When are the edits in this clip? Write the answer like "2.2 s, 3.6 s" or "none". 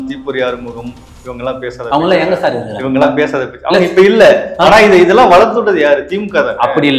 none